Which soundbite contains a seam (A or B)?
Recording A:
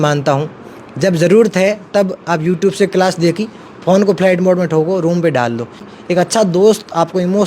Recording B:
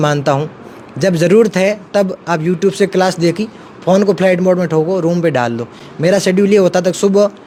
A